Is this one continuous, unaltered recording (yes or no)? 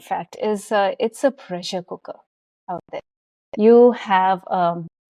yes